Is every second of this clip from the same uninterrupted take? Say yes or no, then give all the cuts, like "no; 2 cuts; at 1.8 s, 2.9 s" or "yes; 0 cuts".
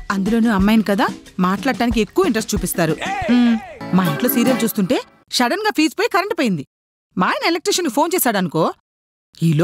no; 1 cut; at 3.7 s